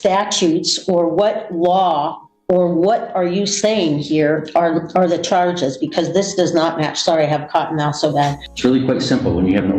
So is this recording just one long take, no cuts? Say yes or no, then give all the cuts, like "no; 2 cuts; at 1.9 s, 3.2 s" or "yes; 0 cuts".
no; 1 cut; at 8.5 s